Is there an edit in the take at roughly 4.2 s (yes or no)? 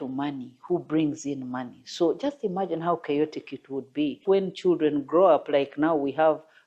yes